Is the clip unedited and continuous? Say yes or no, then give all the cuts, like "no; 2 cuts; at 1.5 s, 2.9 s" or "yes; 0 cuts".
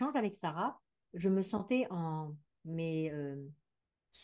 yes; 0 cuts